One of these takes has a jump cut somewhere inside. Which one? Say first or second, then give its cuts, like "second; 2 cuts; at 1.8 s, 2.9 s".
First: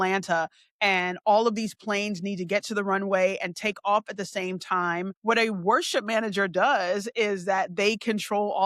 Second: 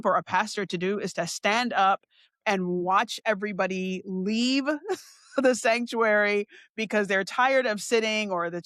first; 1 cut; at 5.1 s